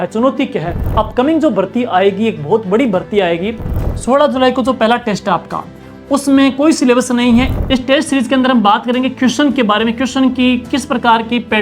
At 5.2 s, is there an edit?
no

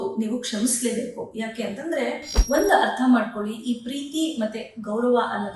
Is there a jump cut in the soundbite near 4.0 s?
no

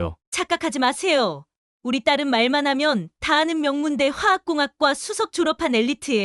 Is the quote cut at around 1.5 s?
no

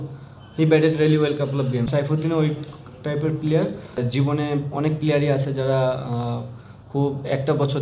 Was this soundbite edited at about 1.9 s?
yes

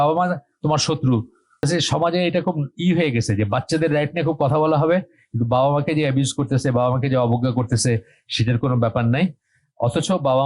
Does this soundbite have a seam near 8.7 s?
no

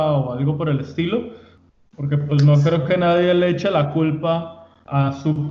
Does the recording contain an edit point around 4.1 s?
no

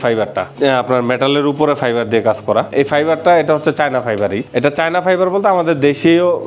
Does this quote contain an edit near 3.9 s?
no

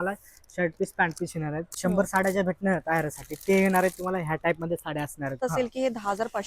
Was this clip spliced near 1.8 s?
yes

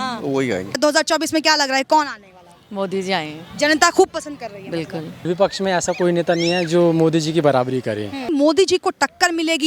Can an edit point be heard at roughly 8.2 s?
yes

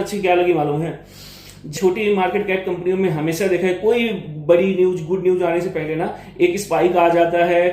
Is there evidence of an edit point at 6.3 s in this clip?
no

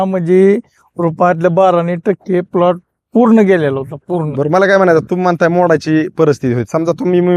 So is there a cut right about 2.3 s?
no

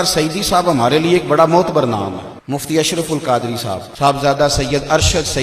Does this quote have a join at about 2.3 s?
yes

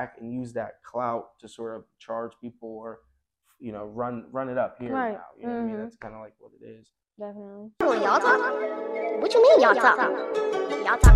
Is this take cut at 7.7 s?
yes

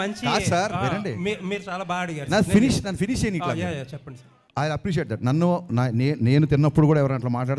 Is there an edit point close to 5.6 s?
no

